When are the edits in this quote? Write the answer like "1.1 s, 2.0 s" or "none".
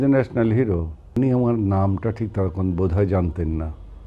1.0 s